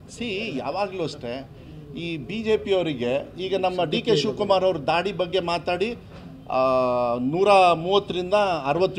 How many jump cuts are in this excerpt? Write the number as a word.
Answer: zero